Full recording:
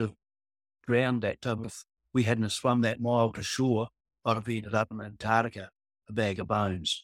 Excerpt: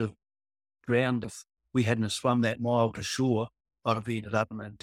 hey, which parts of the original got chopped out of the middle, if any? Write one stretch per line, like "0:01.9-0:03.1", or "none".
0:01.2-0:01.6